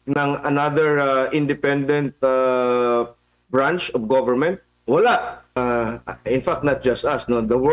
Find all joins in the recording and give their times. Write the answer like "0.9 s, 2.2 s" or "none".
5.6 s